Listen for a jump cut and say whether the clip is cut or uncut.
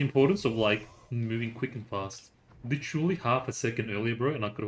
uncut